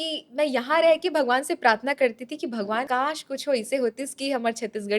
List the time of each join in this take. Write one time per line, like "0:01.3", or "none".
0:02.9